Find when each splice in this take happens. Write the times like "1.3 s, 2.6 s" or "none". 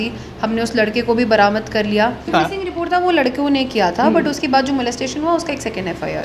2.3 s